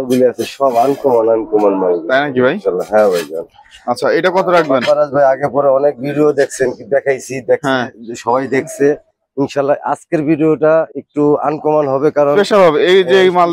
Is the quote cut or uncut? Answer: uncut